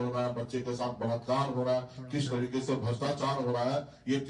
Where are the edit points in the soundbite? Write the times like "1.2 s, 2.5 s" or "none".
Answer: none